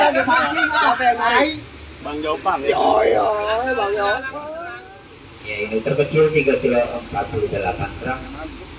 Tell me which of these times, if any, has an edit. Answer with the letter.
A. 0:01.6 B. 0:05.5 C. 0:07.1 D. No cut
B